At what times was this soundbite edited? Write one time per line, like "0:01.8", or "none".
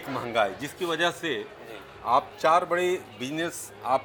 none